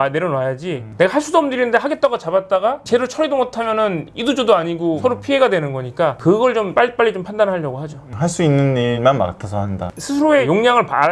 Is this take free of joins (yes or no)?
yes